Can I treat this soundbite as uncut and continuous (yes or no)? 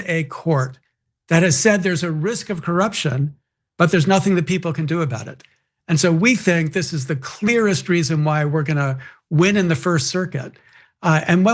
yes